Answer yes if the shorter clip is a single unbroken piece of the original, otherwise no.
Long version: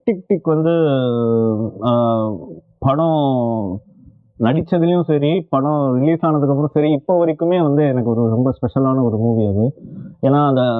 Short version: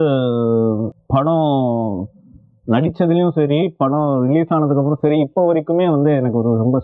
no